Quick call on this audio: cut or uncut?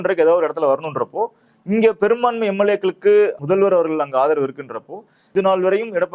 cut